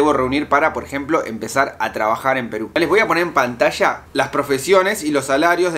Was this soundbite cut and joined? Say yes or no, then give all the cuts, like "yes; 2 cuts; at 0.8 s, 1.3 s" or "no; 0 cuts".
yes; 1 cut; at 2.8 s